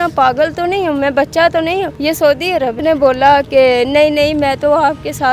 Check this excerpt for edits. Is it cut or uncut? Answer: cut